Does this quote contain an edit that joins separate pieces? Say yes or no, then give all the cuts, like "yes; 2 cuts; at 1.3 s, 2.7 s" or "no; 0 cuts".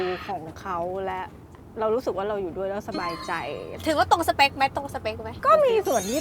yes; 3 cuts; at 1.6 s, 3.7 s, 5.3 s